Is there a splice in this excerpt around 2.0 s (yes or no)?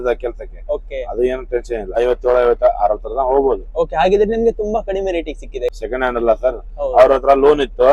yes